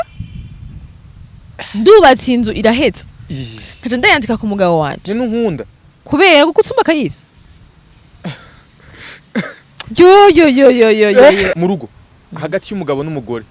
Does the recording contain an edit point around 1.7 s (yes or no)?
no